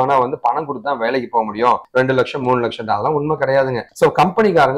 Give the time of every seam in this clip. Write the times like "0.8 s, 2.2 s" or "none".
none